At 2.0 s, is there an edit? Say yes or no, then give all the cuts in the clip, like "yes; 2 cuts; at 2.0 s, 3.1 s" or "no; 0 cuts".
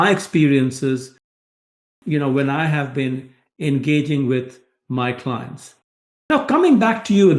no; 0 cuts